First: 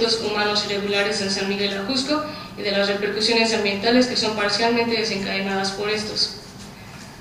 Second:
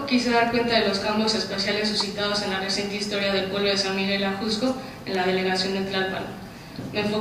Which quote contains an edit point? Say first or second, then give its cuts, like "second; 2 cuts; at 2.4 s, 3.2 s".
second; 1 cut; at 1.8 s